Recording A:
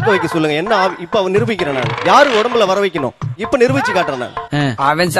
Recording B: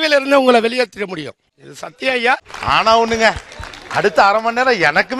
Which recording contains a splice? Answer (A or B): B